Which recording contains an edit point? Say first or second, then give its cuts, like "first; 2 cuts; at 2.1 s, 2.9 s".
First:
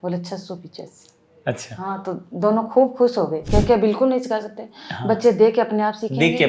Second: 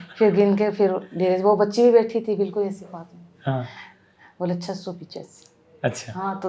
first; 1 cut; at 3.4 s